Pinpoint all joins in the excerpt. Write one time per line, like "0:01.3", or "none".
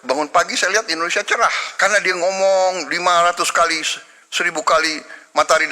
0:01.7